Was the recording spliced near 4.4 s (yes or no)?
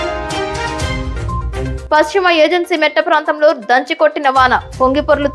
no